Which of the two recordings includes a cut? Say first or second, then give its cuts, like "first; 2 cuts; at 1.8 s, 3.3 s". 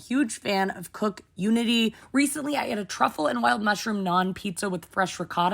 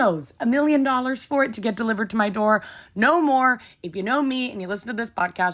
first; 1 cut; at 2.0 s